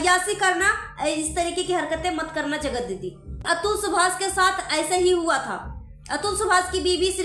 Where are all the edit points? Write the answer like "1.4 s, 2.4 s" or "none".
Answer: 3.4 s